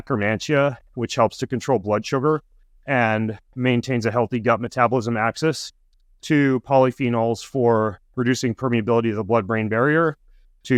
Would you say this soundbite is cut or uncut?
uncut